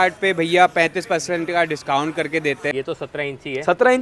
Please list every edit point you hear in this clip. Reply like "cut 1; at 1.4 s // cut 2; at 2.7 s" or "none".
cut 1; at 2.7 s